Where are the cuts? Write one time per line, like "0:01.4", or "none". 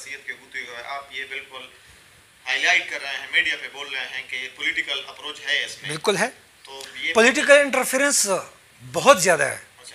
none